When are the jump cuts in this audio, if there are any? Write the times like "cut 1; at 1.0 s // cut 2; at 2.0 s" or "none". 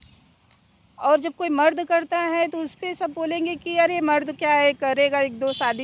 none